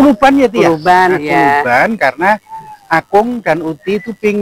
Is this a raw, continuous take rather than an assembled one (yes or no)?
yes